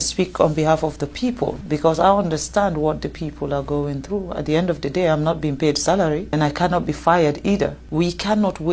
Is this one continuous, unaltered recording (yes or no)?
no